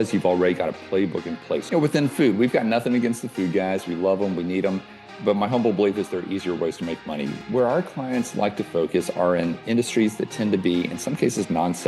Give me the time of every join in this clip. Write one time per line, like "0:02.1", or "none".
0:01.6
0:07.3

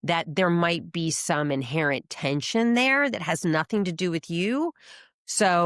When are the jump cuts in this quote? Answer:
0:04.7

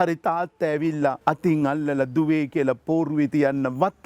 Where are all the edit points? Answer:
0:01.2

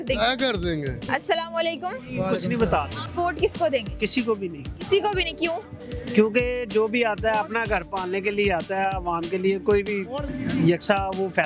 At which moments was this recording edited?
none

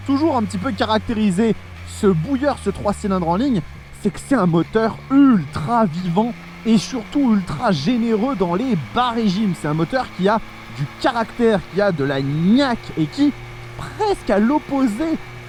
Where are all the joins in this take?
none

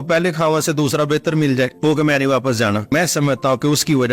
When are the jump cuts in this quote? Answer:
0:01.7
0:02.9

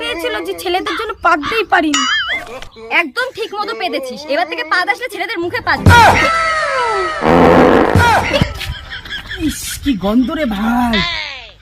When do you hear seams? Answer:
0:02.4
0:06.2

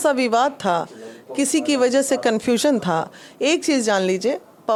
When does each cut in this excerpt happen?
none

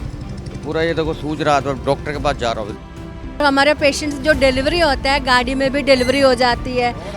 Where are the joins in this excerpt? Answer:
0:03.2

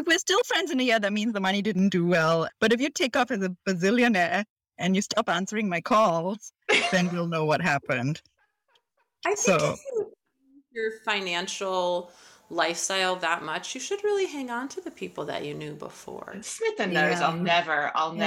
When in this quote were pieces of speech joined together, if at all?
0:02.5

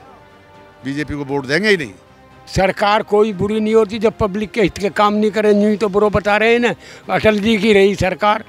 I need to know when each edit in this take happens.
0:02.3

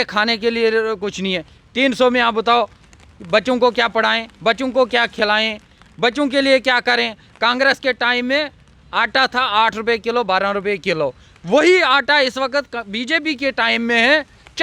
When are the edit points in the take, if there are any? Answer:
none

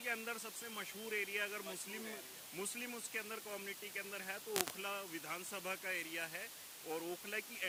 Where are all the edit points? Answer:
none

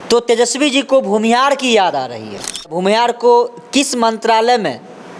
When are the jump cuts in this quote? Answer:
0:02.8

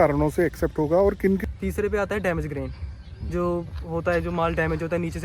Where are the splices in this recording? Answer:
0:01.4

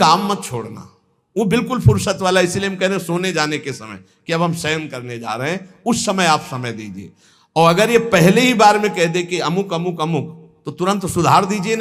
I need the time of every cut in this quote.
none

